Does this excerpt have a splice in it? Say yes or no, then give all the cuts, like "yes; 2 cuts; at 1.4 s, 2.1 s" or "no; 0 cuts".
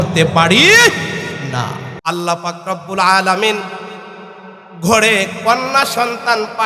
yes; 1 cut; at 1.9 s